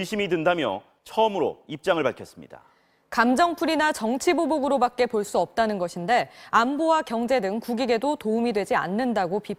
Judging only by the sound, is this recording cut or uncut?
uncut